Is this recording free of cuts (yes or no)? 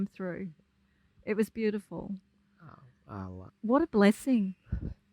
no